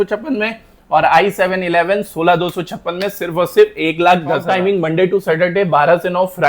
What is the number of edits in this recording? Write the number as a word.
one